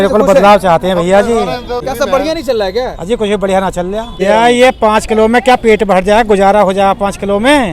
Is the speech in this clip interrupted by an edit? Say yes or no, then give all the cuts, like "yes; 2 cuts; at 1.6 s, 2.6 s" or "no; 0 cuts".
yes; 2 cuts; at 1.8 s, 4.2 s